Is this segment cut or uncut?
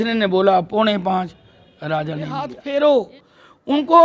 cut